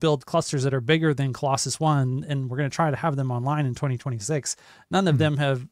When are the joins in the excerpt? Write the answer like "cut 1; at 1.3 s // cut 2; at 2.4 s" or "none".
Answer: none

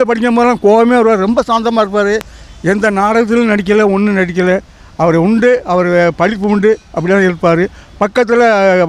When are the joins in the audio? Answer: none

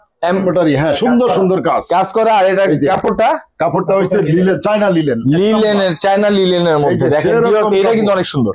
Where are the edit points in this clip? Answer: none

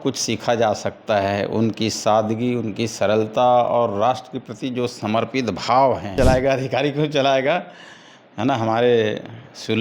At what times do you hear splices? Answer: cut 1; at 6.1 s

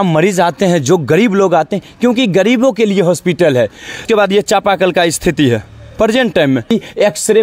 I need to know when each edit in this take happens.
cut 1; at 4.0 s // cut 2; at 6.7 s

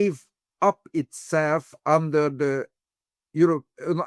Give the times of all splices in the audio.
none

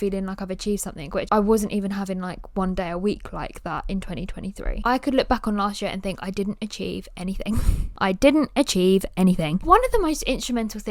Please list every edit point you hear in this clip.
cut 1; at 1.3 s // cut 2; at 4.7 s // cut 3; at 7.8 s // cut 4; at 9.6 s

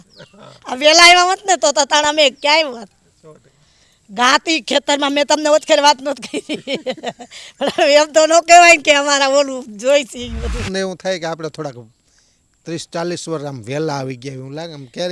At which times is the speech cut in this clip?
cut 1; at 10.7 s

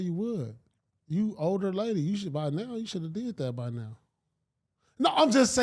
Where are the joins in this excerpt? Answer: none

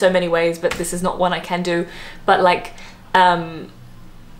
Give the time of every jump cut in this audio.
none

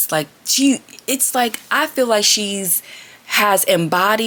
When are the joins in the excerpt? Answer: none

